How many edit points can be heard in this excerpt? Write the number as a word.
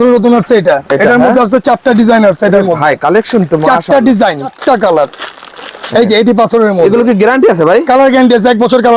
one